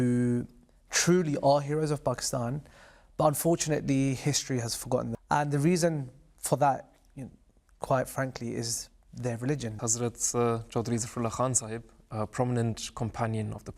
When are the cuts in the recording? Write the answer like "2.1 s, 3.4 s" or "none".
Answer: 5.1 s, 9.7 s